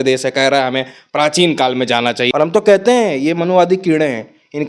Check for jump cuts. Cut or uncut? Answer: cut